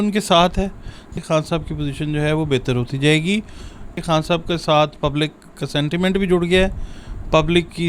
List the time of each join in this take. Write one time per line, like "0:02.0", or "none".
0:01.2
0:03.9